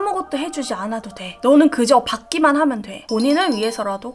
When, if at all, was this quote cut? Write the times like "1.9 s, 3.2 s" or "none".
2.9 s